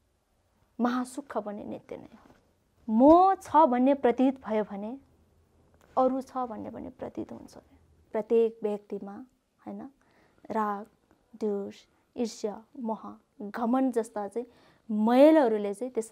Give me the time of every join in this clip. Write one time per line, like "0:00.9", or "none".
0:02.7
0:08.1